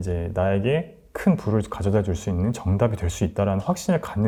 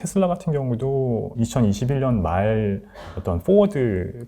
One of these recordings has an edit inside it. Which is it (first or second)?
second